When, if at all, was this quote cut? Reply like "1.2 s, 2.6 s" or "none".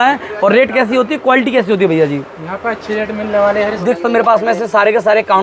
3.8 s